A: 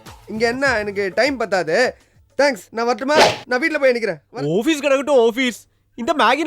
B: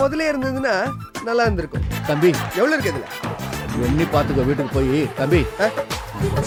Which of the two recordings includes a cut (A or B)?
A